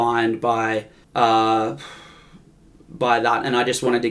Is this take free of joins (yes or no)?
no